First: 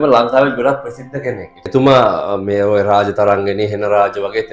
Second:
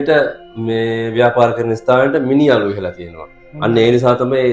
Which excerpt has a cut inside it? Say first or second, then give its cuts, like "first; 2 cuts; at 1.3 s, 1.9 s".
first; 1 cut; at 1.7 s